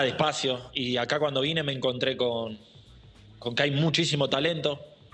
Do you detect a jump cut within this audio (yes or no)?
no